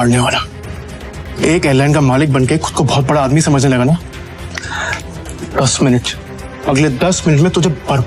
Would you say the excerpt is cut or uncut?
uncut